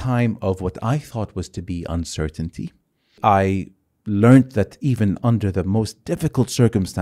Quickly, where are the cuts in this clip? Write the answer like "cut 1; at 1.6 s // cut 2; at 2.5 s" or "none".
cut 1; at 3.2 s